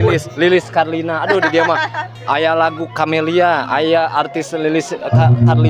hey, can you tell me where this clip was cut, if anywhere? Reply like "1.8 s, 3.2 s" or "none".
none